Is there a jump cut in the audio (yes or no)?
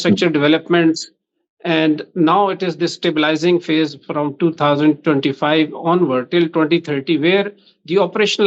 no